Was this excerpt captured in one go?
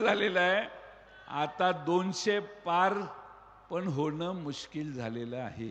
yes; 0 cuts

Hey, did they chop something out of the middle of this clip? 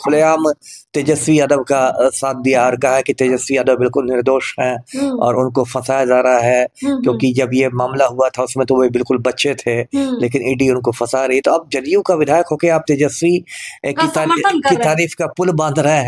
no; 0 cuts

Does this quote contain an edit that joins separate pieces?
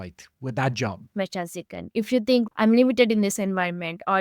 yes; 1 cut; at 1.1 s

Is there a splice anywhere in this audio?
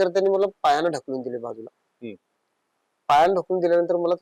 no; 0 cuts

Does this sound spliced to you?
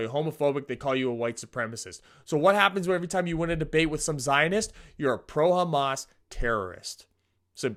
no; 0 cuts

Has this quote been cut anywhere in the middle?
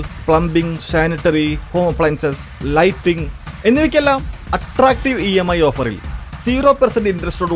no; 0 cuts

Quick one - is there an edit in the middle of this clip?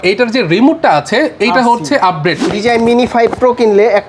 yes; 1 cut; at 2.4 s

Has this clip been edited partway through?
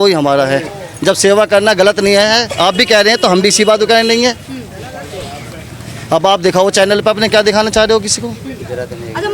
no; 0 cuts

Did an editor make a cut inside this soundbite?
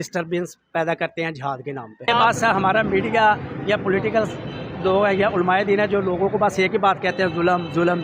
yes; 1 cut; at 2.1 s

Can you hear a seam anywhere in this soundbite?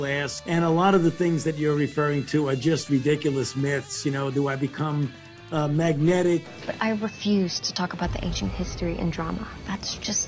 yes; 1 cut; at 6.5 s

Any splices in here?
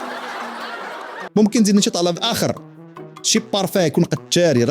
yes; 1 cut; at 1.1 s

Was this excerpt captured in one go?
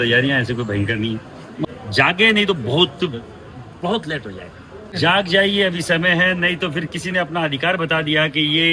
no; 2 cuts; at 1.6 s, 4.9 s

